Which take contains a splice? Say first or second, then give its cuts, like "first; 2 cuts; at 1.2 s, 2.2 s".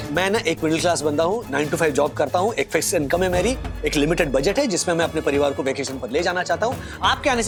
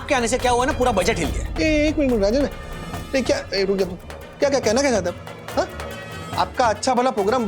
second; 1 cut; at 1.4 s